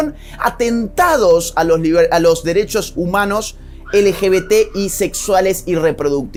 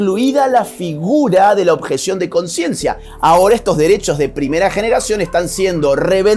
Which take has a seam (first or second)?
second